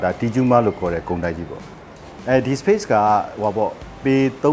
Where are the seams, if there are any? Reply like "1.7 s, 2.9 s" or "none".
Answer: 2.1 s